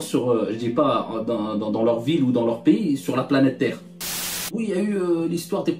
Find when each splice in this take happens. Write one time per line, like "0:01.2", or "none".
0:04.2

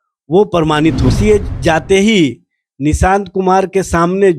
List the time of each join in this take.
0:01.1

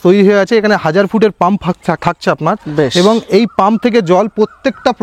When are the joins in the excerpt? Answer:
none

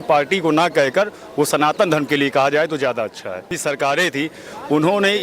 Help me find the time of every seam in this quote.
0:03.6

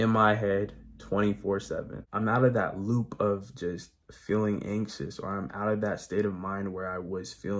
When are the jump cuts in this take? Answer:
0:02.0

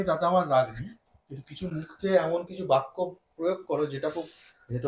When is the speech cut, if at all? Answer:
none

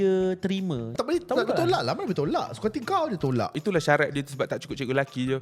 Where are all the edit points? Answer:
0:00.9
0:03.6

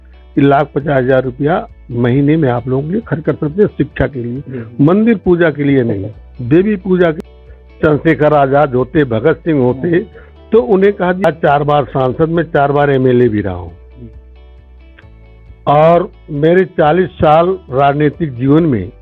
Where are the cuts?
0:07.2
0:11.2

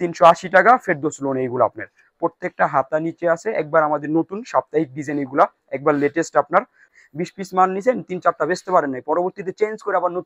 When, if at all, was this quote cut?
0:06.9

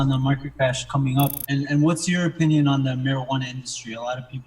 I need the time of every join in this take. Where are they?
0:01.4

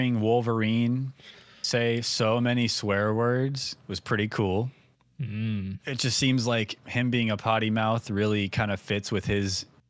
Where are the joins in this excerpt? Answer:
none

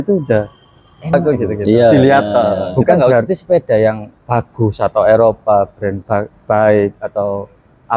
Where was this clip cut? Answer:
0:03.1

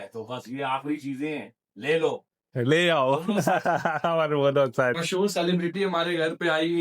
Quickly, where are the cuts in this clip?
0:05.0

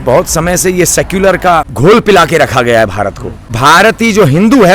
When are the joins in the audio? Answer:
0:01.7
0:03.5

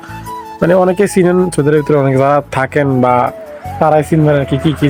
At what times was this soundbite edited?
none

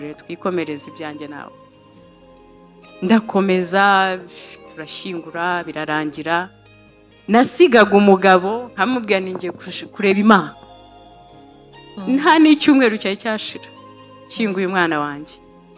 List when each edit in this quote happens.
none

